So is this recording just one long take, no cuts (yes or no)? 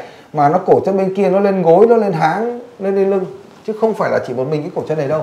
yes